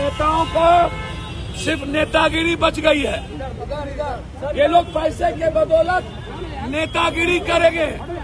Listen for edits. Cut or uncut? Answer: uncut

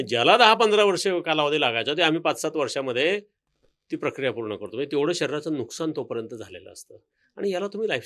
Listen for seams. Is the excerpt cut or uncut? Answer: uncut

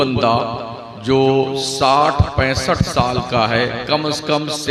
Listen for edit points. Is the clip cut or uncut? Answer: uncut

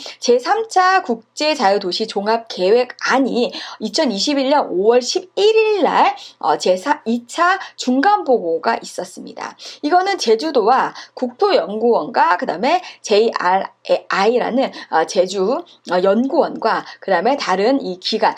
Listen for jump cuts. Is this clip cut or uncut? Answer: uncut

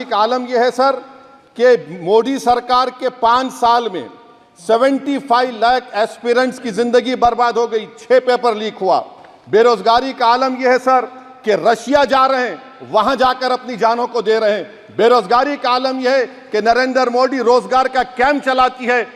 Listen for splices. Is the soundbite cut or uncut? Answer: uncut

